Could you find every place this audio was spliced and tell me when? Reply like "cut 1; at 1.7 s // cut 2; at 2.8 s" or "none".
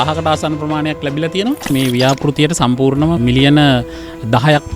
cut 1; at 1.7 s // cut 2; at 3.2 s